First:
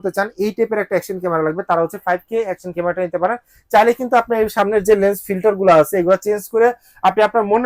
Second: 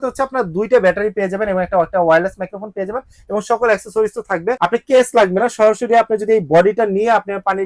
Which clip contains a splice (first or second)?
second